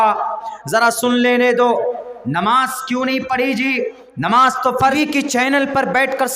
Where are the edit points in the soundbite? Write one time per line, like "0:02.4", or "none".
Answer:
0:04.9